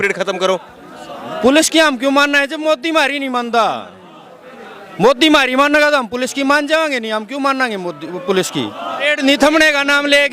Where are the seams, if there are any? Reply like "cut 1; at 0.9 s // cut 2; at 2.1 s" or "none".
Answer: cut 1; at 9.0 s